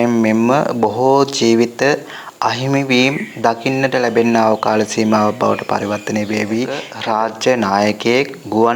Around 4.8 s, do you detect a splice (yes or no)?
no